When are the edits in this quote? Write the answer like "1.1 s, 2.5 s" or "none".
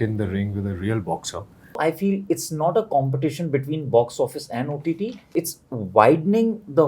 1.8 s, 5.3 s

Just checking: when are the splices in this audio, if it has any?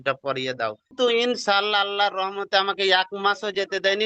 0.9 s

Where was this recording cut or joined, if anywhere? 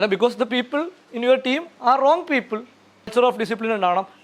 3.1 s

